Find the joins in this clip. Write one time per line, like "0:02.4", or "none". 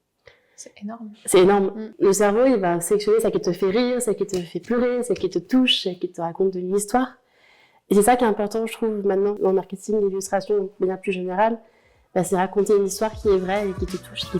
0:01.8
0:09.4